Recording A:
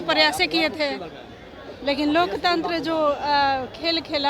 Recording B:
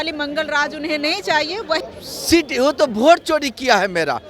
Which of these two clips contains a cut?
B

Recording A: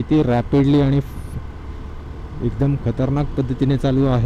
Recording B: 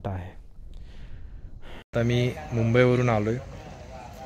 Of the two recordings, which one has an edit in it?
B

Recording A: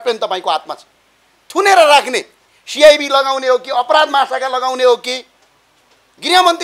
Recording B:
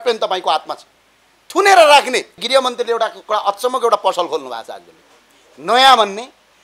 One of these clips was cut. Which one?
B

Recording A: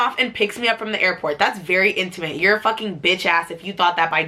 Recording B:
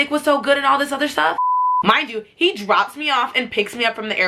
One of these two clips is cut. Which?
B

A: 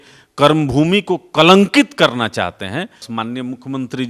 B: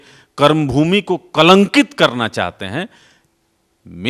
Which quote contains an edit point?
A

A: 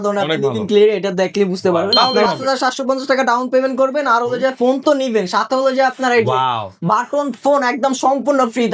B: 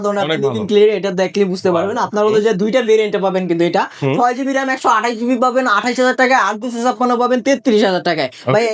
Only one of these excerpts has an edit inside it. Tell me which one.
A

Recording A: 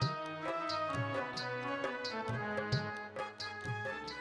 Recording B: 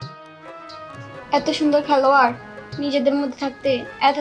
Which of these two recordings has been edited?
B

